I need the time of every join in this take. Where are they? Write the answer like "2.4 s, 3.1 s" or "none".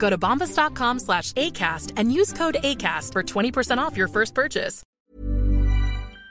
5.0 s

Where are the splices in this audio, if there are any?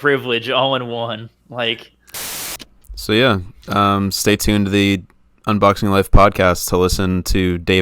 2.4 s

